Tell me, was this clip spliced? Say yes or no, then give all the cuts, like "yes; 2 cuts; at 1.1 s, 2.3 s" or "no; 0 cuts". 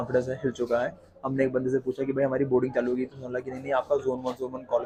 no; 0 cuts